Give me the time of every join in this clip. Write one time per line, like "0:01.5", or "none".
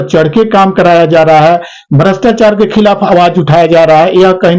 none